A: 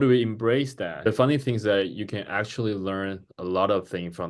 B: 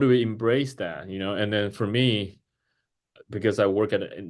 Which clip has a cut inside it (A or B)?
A